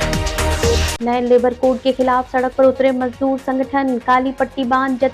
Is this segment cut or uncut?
cut